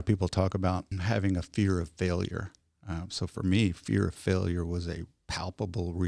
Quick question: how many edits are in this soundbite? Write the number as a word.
one